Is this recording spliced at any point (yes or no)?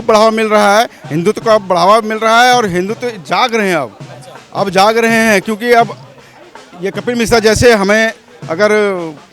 no